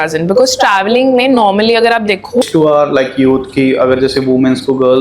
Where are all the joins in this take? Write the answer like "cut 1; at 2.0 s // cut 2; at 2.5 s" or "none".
cut 1; at 2.5 s